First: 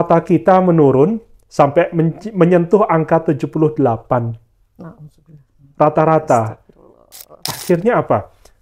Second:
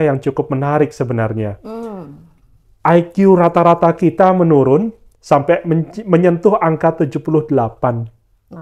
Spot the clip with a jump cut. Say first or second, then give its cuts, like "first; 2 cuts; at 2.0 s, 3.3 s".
first; 1 cut; at 7.4 s